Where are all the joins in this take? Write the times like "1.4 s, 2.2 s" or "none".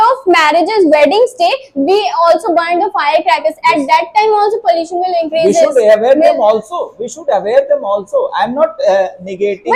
none